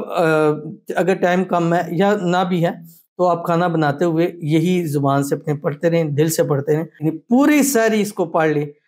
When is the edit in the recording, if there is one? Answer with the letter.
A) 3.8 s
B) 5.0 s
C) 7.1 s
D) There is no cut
C